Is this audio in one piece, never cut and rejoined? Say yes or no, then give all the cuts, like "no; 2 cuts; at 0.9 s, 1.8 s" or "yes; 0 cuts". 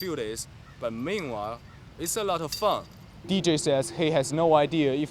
no; 1 cut; at 3.2 s